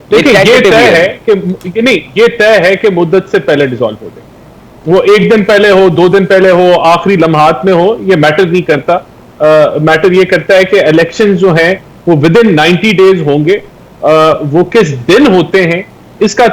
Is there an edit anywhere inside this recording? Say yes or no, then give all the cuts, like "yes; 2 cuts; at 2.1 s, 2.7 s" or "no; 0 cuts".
no; 0 cuts